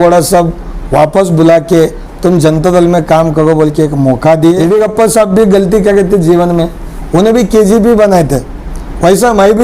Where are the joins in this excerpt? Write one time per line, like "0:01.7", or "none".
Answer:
0:04.6